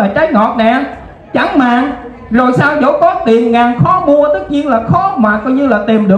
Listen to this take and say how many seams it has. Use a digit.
0